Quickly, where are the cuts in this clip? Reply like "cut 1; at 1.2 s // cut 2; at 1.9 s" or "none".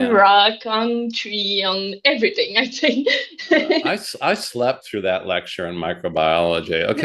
none